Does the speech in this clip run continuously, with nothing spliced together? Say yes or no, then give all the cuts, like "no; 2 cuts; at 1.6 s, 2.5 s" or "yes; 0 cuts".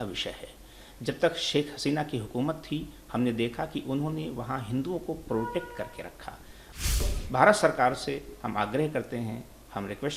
no; 1 cut; at 7.0 s